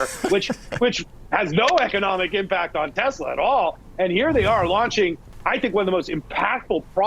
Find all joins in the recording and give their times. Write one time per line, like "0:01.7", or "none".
0:03.8